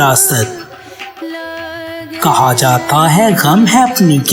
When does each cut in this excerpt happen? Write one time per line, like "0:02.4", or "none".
none